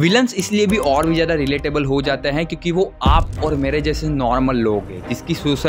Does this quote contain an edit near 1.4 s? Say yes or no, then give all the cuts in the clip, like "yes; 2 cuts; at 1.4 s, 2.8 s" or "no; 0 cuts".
no; 0 cuts